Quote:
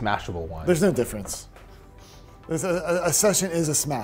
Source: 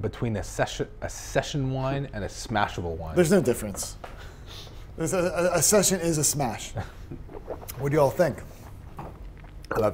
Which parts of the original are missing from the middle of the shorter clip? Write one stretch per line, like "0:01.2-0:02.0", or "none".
none